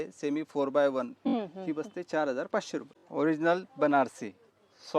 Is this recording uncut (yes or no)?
no